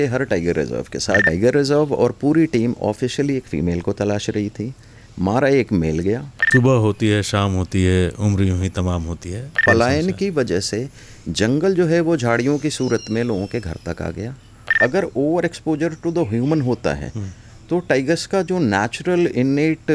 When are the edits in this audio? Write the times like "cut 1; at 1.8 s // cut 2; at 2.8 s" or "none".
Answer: cut 1; at 1.3 s // cut 2; at 6.3 s // cut 3; at 9.6 s // cut 4; at 14.7 s